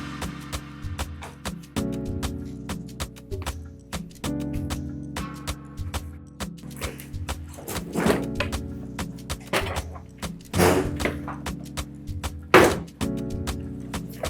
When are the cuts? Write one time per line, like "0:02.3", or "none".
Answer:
0:06.6